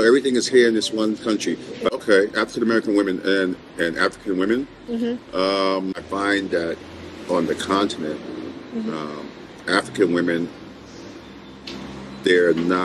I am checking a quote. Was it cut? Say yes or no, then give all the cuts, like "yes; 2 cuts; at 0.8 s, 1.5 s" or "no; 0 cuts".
yes; 2 cuts; at 1.9 s, 6.0 s